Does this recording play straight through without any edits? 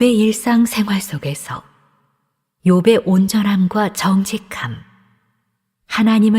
no; 1 cut; at 0.9 s

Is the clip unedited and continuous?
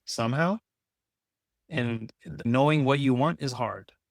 no; 1 cut; at 2.4 s

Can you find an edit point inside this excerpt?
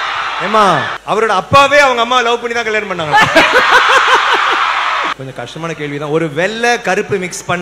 yes; 2 cuts; at 0.9 s, 5.1 s

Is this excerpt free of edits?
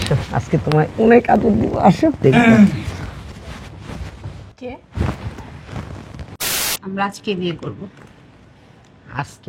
no; 1 cut; at 6.4 s

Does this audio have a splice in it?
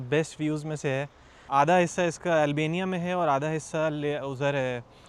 yes; 1 cut; at 1.4 s

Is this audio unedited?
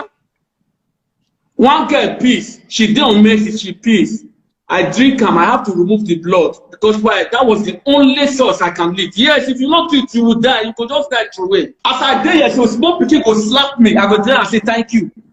no; 1 cut; at 11.7 s

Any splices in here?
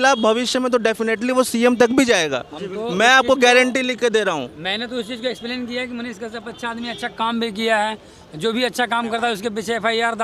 no; 0 cuts

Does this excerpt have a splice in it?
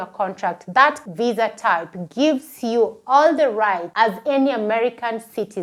no; 0 cuts

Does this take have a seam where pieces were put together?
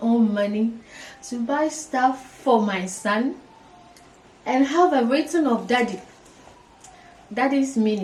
no; 0 cuts

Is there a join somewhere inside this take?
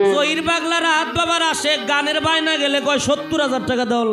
no; 0 cuts

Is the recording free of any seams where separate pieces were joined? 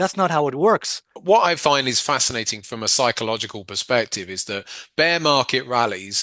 no; 1 cut; at 1.2 s

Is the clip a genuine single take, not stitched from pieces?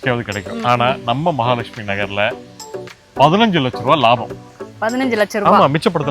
no; 1 cut; at 2.8 s

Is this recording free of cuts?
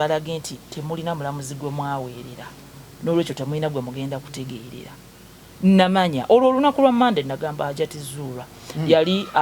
yes; 0 cuts

